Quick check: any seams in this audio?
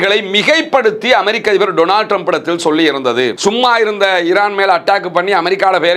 yes; 1 cut; at 3.4 s

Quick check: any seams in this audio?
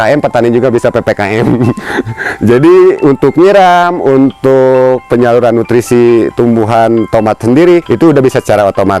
yes; 1 cut; at 7.9 s

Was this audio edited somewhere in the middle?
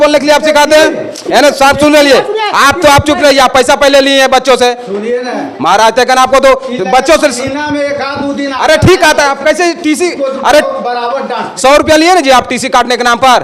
no; 0 cuts

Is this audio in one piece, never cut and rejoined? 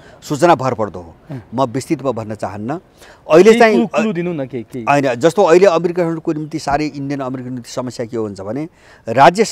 yes; 0 cuts

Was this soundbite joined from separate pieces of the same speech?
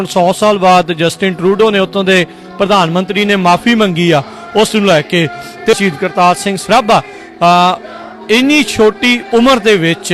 yes; 1 cut; at 5.7 s

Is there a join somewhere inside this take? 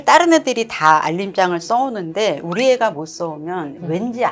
no; 0 cuts

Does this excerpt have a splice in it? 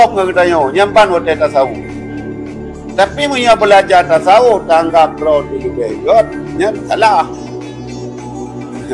no; 0 cuts

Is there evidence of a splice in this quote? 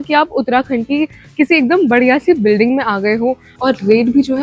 yes; 1 cut; at 3.5 s

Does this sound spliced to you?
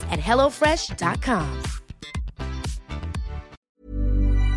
yes; 1 cut; at 3.6 s

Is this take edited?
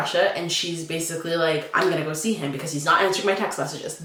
no; 0 cuts

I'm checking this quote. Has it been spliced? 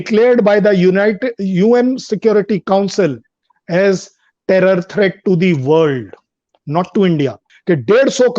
yes; 1 cut; at 7.5 s

